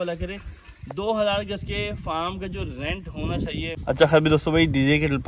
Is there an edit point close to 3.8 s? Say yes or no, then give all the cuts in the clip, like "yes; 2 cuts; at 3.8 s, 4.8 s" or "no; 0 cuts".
yes; 1 cut; at 3.8 s